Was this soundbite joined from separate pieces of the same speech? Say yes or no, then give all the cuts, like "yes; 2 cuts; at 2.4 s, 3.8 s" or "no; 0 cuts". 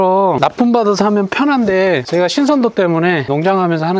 no; 0 cuts